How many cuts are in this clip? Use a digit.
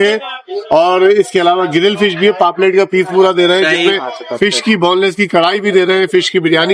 0